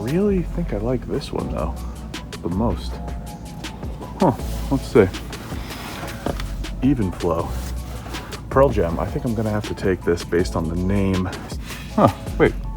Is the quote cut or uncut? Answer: cut